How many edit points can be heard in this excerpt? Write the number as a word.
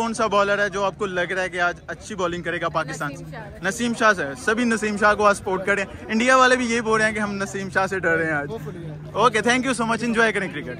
zero